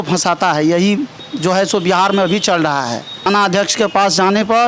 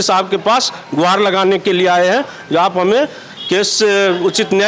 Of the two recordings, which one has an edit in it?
first; 1 cut; at 3.1 s

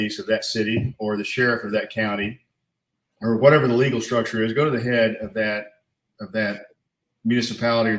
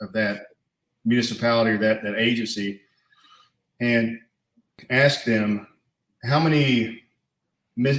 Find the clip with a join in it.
second; 1 cut; at 4.8 s

